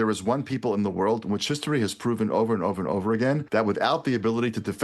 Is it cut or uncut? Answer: cut